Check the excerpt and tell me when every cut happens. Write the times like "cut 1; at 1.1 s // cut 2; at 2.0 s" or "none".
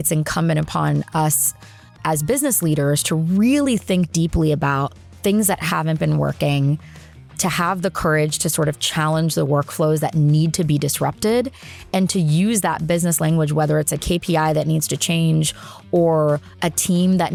none